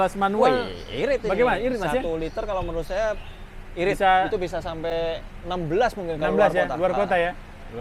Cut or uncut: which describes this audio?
uncut